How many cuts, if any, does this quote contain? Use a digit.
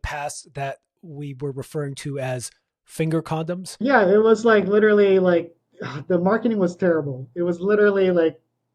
1